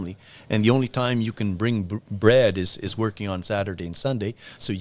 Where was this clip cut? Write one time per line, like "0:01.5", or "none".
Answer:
none